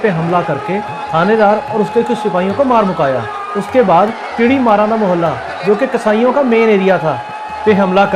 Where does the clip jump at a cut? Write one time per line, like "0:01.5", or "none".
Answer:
none